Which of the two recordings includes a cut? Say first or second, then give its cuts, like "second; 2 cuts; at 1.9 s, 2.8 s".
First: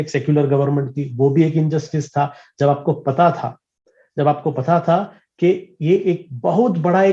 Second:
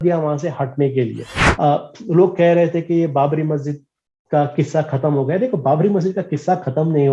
second; 1 cut; at 1.5 s